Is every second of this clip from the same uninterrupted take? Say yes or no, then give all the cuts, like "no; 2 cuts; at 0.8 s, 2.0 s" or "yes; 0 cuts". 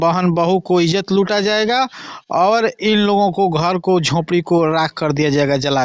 yes; 0 cuts